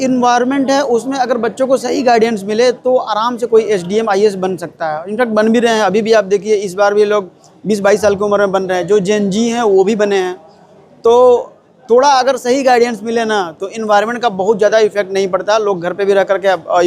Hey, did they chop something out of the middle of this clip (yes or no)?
no